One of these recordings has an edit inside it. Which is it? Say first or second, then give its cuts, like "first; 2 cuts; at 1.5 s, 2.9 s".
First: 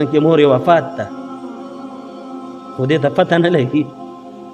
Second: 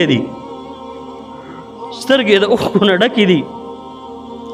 first; 2 cuts; at 1.1 s, 2.7 s